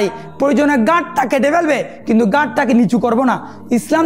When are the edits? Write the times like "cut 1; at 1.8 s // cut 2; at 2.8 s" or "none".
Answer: none